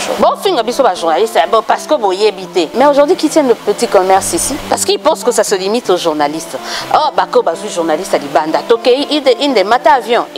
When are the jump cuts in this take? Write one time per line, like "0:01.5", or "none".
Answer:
0:02.7
0:04.6